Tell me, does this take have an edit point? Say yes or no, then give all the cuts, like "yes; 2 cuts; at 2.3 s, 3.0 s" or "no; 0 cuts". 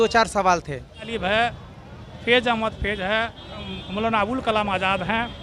yes; 1 cut; at 1.1 s